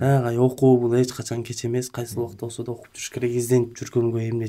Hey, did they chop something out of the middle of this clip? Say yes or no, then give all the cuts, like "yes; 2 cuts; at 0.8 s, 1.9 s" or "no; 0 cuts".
no; 0 cuts